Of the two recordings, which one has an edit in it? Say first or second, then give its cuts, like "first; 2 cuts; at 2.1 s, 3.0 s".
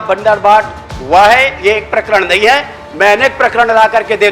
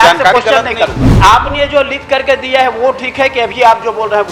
second; 1 cut; at 1.0 s